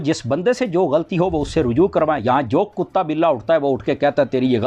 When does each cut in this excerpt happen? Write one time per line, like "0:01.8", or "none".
none

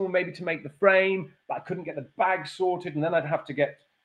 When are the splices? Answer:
none

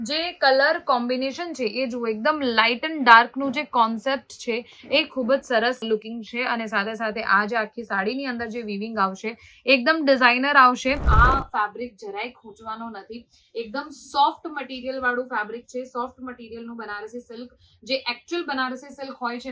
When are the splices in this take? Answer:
0:11.1

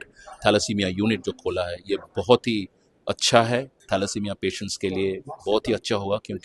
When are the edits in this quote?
0:03.8

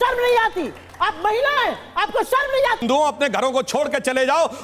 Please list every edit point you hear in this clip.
0:02.8

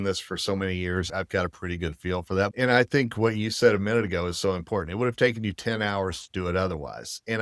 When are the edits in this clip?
0:02.5

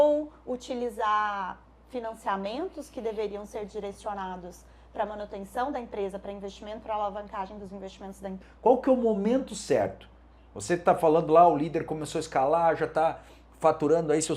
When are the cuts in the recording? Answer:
0:08.4

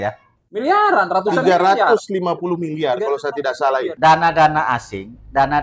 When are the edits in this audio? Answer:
0:03.9

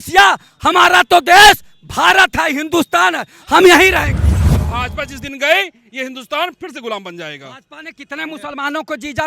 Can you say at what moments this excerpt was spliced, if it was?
0:04.3

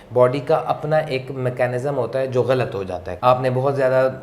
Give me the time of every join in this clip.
0:03.0

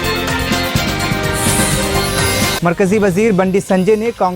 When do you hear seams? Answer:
0:02.6

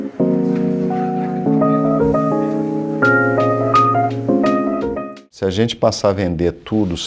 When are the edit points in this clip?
0:05.2

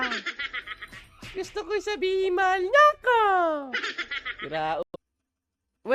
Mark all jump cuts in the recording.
0:04.9

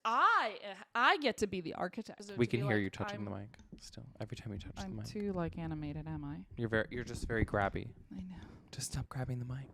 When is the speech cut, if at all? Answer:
0:02.2

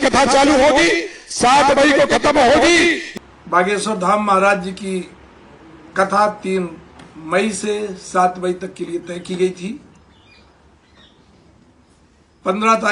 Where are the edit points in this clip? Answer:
0:03.1

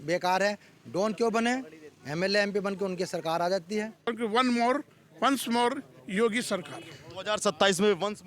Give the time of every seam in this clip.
0:04.1

